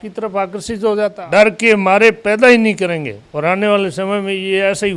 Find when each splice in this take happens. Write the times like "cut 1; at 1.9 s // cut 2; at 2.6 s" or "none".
cut 1; at 1.2 s